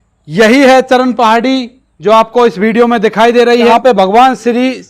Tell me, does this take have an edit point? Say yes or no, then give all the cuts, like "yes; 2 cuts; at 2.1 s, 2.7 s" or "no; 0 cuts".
yes; 1 cut; at 3.7 s